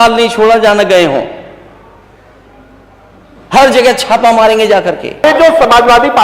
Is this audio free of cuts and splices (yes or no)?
no